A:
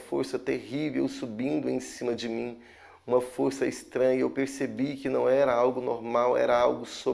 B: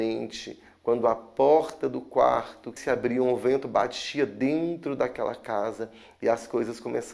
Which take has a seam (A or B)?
B